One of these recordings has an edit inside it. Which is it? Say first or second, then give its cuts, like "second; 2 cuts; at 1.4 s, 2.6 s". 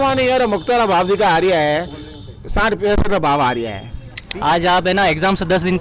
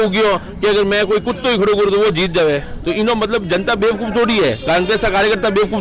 first; 1 cut; at 4.3 s